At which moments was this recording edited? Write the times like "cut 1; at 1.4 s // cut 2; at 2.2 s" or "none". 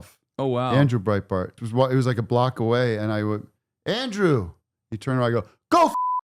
cut 1; at 1.6 s